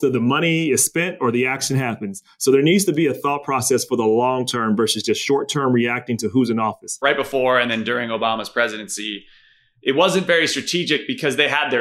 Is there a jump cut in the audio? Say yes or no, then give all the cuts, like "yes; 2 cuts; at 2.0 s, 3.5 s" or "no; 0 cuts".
yes; 1 cut; at 7.0 s